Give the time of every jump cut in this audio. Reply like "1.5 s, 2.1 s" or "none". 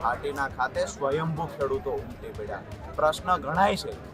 2.8 s